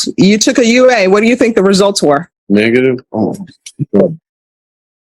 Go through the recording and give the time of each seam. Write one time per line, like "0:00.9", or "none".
0:02.3